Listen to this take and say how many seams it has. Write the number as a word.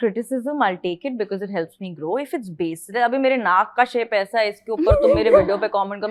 zero